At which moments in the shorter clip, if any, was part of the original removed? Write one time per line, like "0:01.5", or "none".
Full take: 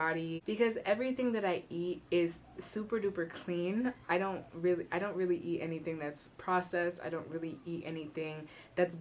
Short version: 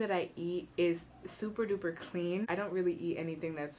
0:02.4